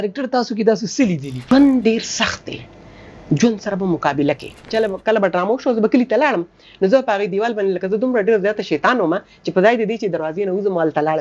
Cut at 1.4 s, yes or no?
yes